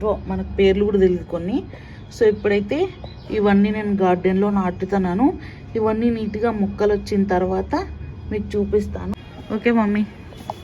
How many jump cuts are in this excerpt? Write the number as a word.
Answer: one